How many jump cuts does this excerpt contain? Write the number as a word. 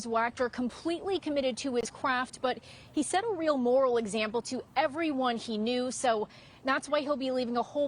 one